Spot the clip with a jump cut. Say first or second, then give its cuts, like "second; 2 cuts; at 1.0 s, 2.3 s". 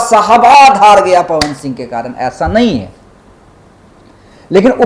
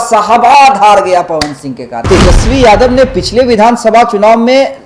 second; 1 cut; at 2.0 s